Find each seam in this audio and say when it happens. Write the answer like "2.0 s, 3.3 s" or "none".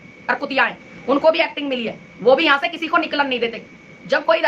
none